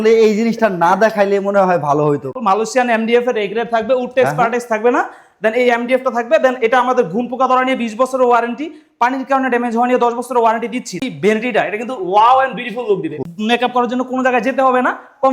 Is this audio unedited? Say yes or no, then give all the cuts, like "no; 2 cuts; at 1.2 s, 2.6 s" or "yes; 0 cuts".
no; 3 cuts; at 2.4 s, 11.0 s, 13.2 s